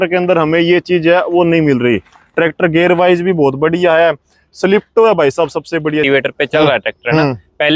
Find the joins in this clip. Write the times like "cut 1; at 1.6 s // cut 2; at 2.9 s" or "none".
cut 1; at 6.0 s